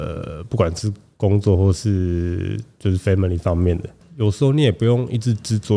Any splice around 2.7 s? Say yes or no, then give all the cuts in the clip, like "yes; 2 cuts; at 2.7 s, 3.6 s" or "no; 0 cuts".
no; 1 cut; at 4.0 s